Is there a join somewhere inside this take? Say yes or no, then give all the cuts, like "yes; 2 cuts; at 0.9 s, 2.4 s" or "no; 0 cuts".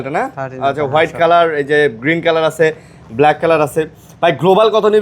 no; 0 cuts